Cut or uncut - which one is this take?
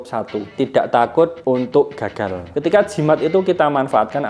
cut